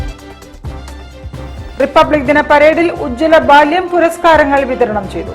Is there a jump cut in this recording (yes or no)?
yes